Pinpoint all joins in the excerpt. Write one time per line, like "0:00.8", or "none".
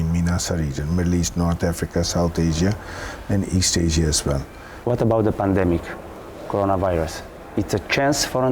0:04.7